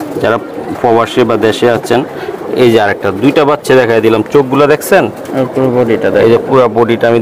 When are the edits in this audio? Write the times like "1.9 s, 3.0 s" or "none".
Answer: none